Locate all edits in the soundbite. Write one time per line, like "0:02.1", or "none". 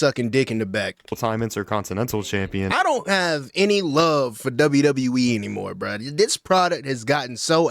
none